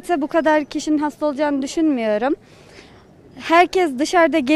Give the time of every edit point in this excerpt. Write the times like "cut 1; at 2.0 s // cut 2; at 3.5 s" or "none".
none